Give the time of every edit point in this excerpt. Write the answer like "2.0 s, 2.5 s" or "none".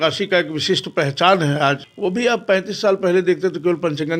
1.9 s